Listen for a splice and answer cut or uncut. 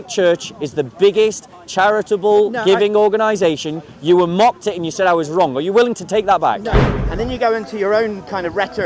cut